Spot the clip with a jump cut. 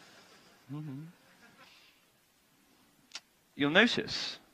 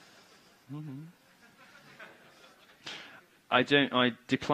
second; 1 cut; at 1.7 s

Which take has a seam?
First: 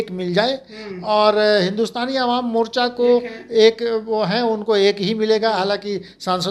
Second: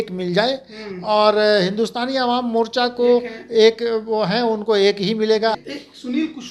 second; 1 cut; at 5.5 s

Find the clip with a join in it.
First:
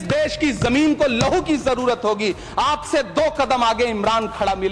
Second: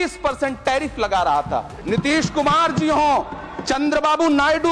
second; 1 cut; at 1.8 s

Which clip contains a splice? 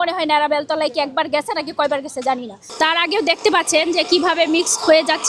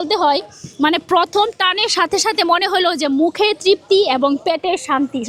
first; 1 cut; at 2.6 s

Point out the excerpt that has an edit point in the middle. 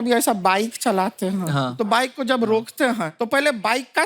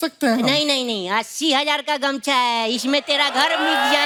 first; 1 cut; at 3.1 s

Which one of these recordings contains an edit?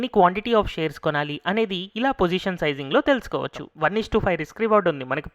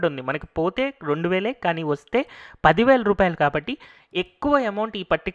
first; 1 cut; at 3.6 s

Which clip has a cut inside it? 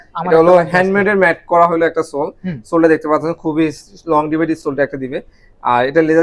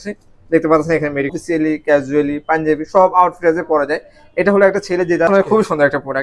second; 2 cuts; at 1.3 s, 5.3 s

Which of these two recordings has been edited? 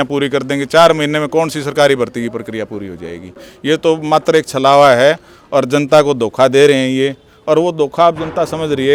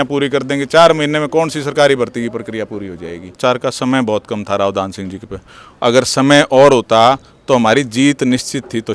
second; 1 cut; at 3.3 s

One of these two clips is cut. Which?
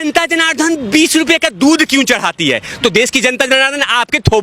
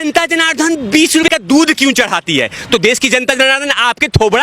second; 1 cut; at 1.3 s

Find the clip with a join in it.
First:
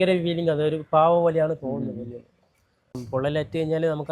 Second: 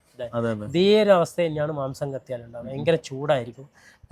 first; 1 cut; at 3.0 s

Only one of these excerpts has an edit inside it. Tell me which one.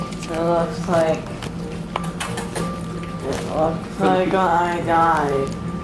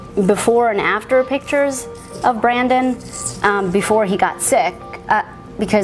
second; 1 cut; at 4.2 s

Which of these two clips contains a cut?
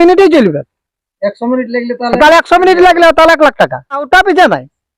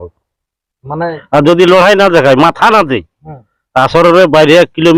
first; 1 cut; at 4.1 s

